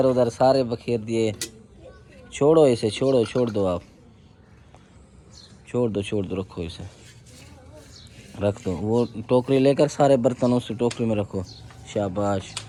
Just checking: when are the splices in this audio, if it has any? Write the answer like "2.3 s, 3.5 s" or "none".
none